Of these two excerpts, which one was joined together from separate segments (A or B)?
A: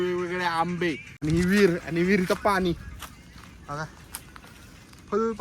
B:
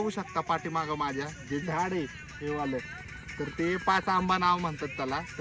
A